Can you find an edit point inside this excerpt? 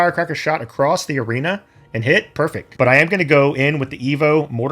yes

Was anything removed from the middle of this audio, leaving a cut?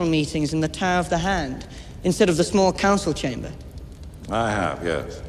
yes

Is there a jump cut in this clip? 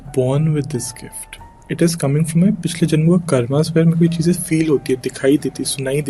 no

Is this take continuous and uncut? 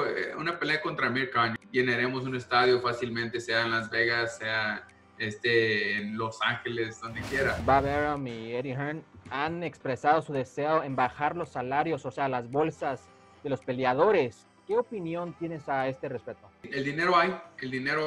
no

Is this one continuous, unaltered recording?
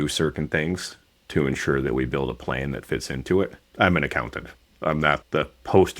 no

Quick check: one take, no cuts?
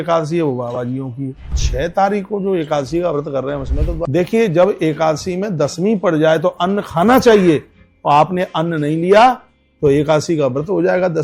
no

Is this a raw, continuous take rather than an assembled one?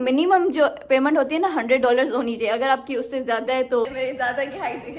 no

